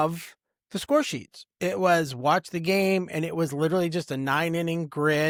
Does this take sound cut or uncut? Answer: uncut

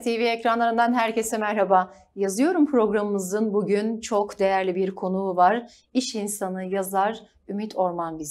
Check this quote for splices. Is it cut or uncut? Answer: uncut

